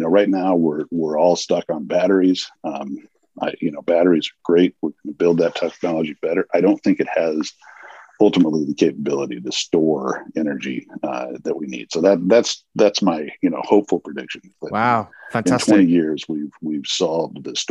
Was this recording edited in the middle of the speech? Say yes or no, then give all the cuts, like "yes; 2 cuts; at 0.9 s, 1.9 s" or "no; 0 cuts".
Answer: no; 0 cuts